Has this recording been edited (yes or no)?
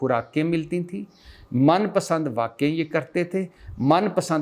no